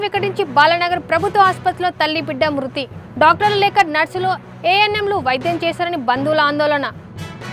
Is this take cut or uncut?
uncut